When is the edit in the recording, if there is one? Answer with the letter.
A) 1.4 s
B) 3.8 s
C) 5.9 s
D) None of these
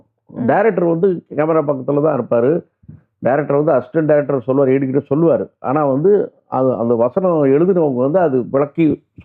D